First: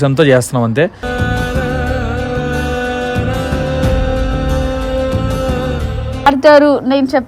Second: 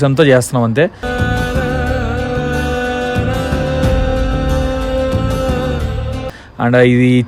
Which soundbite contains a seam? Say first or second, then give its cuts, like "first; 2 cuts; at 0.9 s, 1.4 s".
first; 1 cut; at 6.2 s